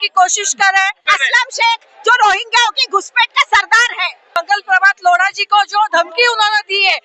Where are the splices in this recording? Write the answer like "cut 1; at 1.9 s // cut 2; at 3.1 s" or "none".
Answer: cut 1; at 1.1 s // cut 2; at 4.2 s